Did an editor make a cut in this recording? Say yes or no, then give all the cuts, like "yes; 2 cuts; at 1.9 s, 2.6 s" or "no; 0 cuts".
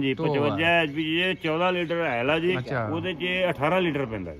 yes; 1 cut; at 2.7 s